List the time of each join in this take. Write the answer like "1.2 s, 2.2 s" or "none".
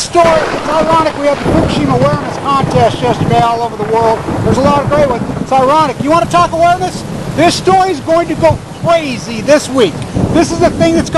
3.4 s